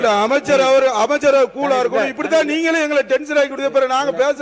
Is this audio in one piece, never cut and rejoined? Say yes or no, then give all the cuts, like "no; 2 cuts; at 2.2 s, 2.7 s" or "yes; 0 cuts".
yes; 0 cuts